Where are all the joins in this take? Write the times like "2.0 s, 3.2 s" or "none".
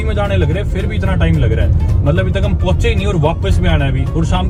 none